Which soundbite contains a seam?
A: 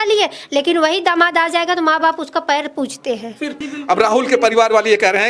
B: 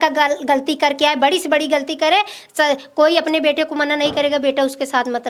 A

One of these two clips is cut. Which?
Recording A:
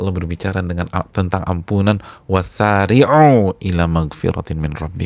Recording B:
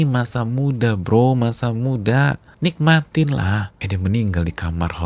B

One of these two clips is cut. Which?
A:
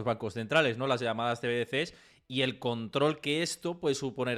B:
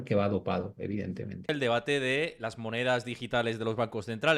B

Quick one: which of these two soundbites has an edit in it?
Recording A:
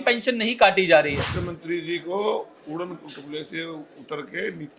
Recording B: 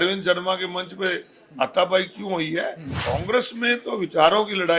B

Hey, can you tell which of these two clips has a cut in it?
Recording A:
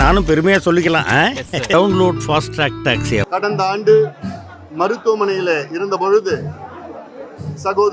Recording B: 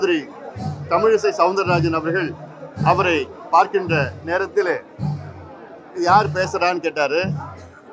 A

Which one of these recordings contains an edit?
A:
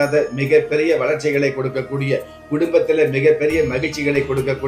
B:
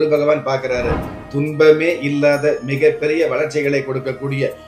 B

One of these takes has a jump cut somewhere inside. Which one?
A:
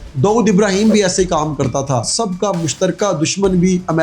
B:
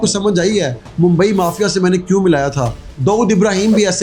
A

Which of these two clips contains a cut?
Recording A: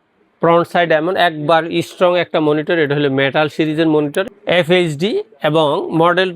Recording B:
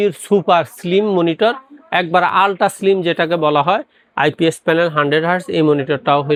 A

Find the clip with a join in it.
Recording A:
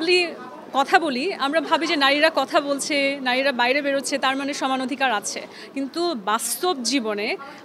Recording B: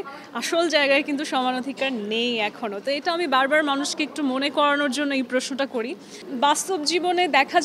B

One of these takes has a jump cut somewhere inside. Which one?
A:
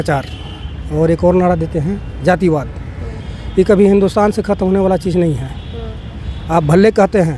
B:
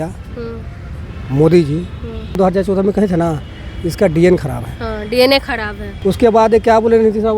B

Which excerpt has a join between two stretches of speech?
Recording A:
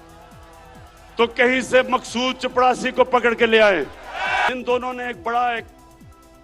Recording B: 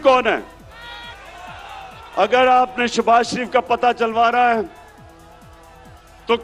A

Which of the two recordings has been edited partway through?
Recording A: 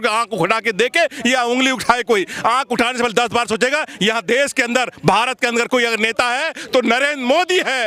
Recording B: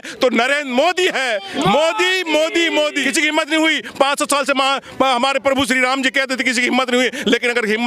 B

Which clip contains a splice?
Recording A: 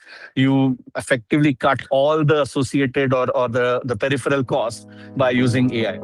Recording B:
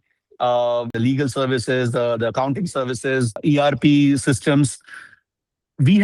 B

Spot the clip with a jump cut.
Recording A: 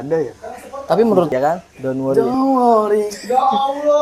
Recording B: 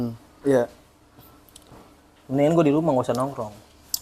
A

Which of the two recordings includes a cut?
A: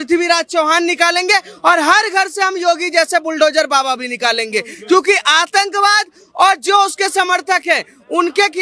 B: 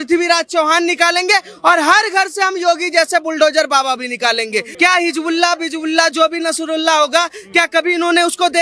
B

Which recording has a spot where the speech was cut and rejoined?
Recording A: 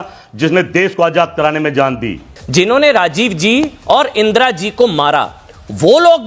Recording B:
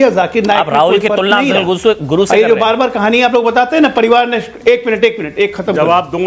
A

